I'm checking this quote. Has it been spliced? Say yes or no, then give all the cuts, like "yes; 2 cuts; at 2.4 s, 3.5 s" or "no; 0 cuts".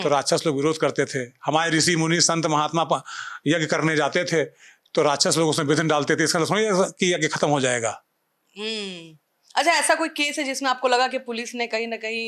no; 0 cuts